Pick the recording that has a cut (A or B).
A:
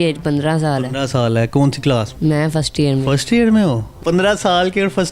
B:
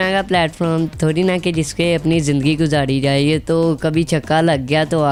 A